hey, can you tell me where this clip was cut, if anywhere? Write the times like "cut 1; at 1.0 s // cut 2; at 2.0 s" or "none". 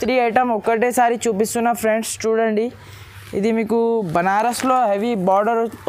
none